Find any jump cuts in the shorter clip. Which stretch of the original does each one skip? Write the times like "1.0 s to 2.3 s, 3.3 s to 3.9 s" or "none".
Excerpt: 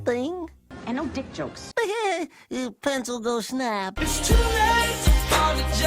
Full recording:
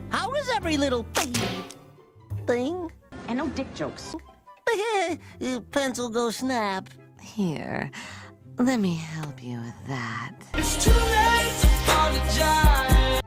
4.0 s to 4.5 s, 6.8 s to 10.5 s